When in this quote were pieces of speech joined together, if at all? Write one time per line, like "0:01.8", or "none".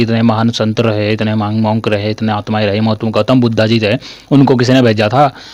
none